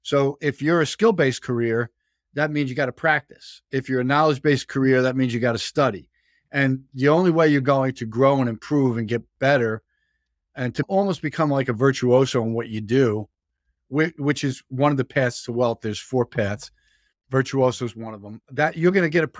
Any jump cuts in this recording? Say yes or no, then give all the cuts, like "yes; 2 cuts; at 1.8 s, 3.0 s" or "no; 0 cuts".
yes; 2 cuts; at 10.9 s, 13.8 s